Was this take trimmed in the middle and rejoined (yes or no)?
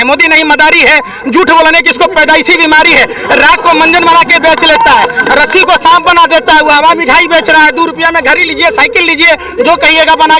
no